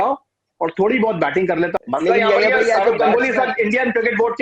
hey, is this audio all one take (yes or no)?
no